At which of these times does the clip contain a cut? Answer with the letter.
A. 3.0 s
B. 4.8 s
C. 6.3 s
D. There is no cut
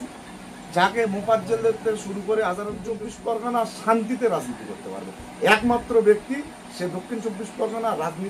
A